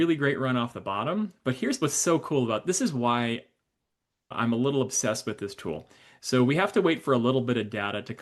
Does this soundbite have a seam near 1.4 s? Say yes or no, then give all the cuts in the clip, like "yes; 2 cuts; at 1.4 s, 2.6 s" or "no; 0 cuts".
no; 1 cut; at 4.3 s